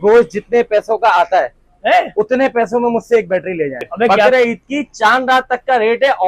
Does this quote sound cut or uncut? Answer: cut